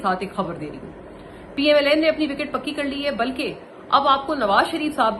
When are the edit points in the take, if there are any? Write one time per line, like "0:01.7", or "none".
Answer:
none